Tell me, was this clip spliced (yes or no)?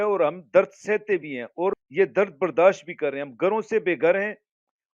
yes